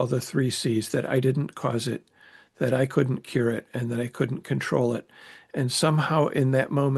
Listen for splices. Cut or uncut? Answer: uncut